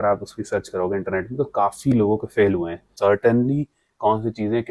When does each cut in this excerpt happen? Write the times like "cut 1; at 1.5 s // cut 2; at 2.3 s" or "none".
cut 1; at 2.9 s